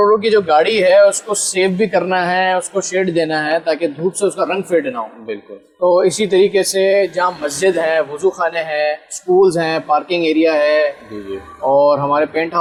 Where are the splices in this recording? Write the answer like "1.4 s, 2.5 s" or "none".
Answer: none